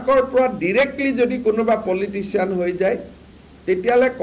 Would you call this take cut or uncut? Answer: uncut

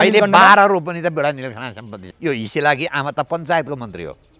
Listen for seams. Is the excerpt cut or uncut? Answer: cut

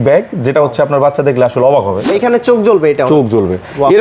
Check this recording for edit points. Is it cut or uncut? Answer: cut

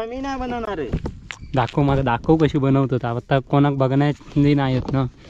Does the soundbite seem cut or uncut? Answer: uncut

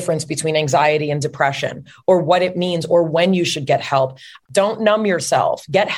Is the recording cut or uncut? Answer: cut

